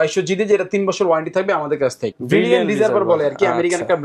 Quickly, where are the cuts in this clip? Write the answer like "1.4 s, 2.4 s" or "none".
2.1 s